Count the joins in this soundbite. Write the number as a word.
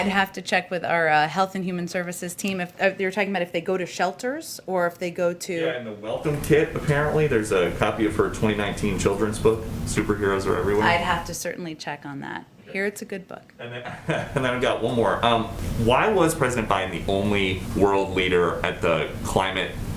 zero